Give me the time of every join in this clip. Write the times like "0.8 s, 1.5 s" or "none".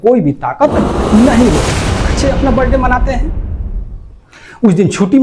2.2 s